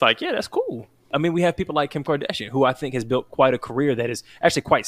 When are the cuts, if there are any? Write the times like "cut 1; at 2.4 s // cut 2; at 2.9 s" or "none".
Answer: cut 1; at 1.1 s